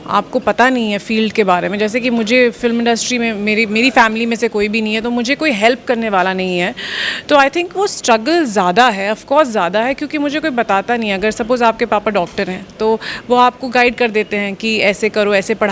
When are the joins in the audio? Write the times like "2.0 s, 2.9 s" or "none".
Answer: none